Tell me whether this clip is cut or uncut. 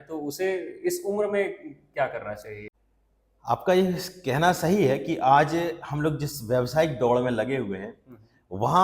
cut